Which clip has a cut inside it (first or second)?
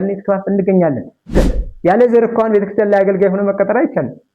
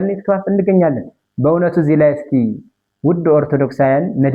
first